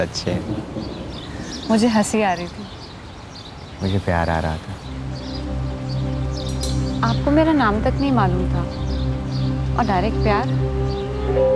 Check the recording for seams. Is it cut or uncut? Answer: uncut